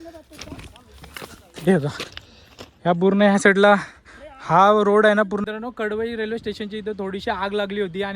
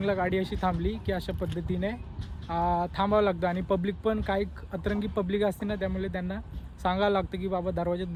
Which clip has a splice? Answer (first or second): first